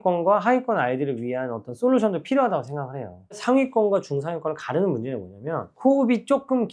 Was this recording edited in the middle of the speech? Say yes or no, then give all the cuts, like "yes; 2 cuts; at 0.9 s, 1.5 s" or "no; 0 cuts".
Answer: yes; 1 cut; at 3.3 s